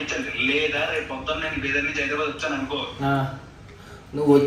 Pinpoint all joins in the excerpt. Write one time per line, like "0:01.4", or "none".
none